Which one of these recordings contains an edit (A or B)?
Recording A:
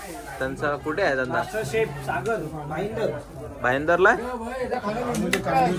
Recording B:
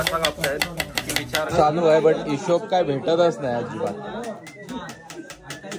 B